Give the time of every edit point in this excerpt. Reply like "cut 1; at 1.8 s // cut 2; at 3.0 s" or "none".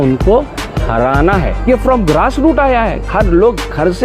cut 1; at 1.6 s

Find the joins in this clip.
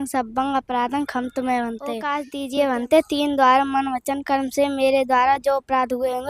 cut 1; at 2.2 s

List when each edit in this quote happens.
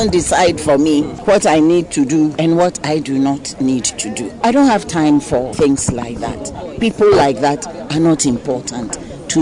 cut 1; at 1.1 s // cut 2; at 2.3 s // cut 3; at 4.4 s // cut 4; at 5.5 s

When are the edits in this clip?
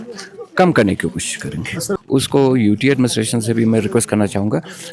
cut 1; at 1.8 s

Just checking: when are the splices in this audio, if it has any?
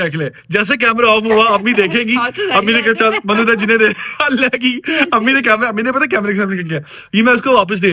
none

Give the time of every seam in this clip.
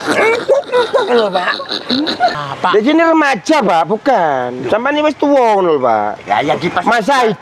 cut 1; at 2.3 s

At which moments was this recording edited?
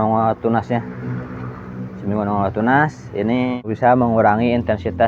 cut 1; at 3.7 s

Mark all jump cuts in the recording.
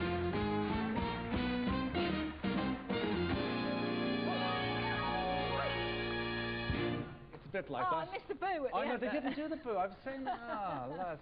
cut 1; at 6.0 s

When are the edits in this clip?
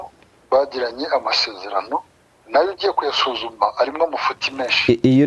none

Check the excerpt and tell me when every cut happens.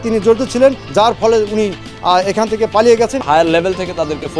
cut 1; at 0.8 s // cut 2; at 3.2 s

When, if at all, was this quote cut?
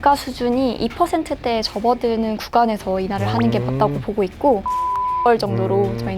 cut 1; at 5.3 s

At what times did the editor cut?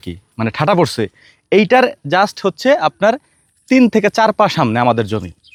none

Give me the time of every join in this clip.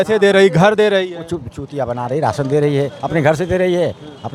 none

